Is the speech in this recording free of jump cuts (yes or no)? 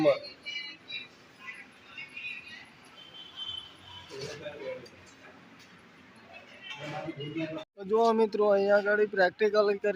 no